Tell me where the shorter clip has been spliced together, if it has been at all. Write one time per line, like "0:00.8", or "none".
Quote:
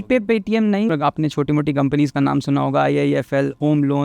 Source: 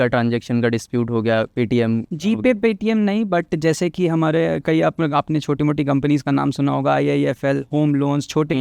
0:00.9